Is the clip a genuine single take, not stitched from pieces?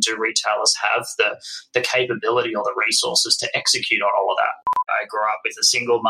no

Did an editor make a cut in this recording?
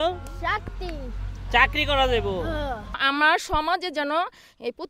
yes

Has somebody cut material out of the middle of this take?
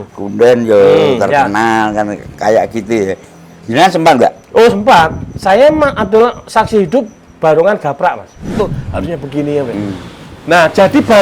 yes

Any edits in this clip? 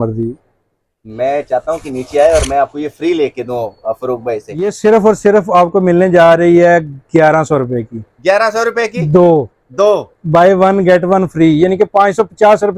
yes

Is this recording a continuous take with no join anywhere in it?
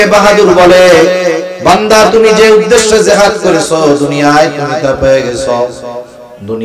yes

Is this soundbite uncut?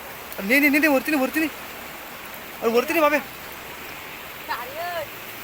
yes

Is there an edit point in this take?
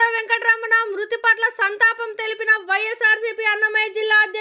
no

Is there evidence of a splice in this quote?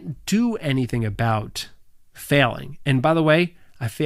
no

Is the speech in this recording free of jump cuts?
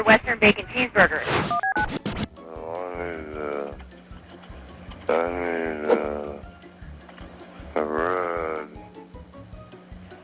no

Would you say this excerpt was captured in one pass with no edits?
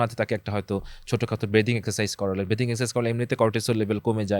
yes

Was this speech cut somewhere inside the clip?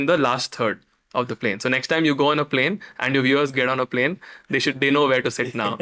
no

